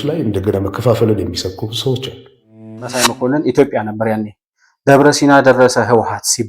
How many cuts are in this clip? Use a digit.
1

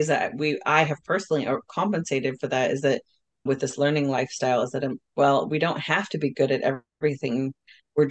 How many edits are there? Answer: 0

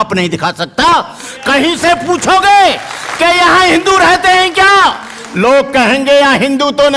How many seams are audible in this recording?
0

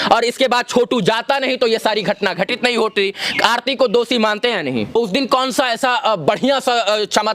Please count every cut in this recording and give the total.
1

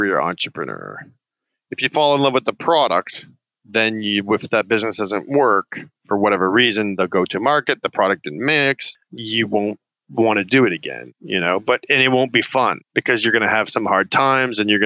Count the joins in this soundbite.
1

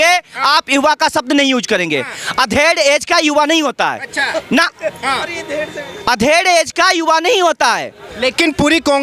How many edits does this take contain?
0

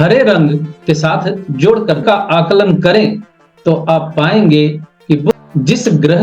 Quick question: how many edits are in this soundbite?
2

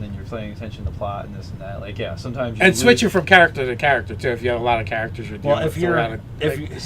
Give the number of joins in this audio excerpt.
1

